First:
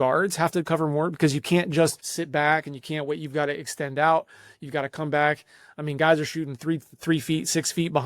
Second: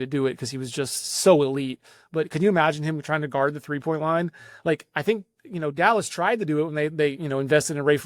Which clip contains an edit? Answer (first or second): first